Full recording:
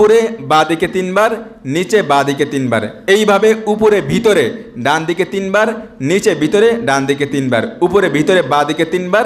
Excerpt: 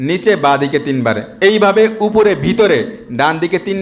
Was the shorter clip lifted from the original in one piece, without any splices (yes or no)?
yes